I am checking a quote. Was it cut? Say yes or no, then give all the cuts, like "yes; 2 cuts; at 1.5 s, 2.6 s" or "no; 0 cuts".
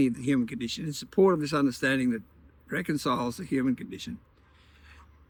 no; 0 cuts